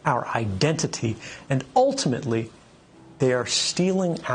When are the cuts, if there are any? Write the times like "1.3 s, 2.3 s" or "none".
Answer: none